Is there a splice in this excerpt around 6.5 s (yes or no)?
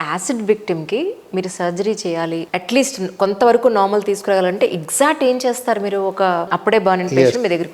yes